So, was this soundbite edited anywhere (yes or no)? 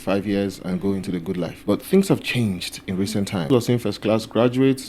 yes